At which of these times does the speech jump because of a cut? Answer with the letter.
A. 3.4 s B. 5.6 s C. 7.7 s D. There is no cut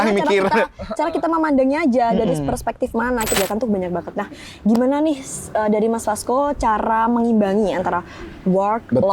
A